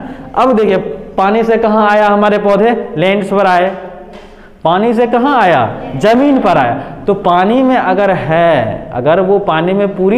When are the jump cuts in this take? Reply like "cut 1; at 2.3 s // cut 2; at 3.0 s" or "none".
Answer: none